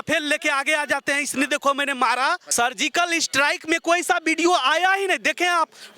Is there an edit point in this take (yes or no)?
yes